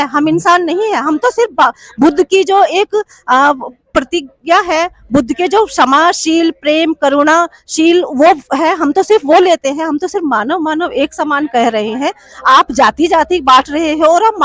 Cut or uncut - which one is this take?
uncut